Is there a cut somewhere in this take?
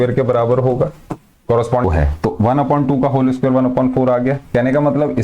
yes; 1 cut; at 1.8 s

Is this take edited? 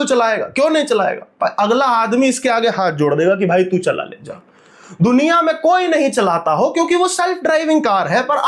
no; 0 cuts

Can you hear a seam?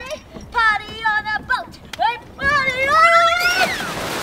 no; 0 cuts

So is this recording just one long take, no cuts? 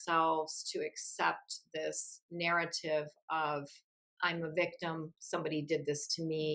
yes; 0 cuts

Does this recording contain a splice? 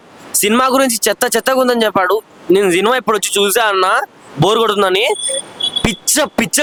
no; 0 cuts

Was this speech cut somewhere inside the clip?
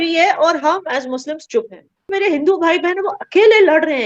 yes; 1 cut; at 2.1 s

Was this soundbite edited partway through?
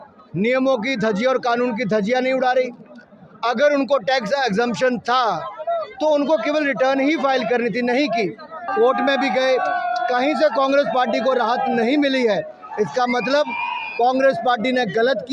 yes; 1 cut; at 8.5 s

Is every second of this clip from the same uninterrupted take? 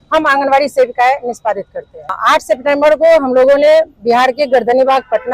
no; 1 cut; at 2.2 s

